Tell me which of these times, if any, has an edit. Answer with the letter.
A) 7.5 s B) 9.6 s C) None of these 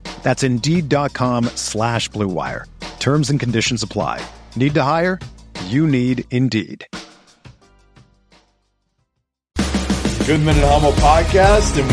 B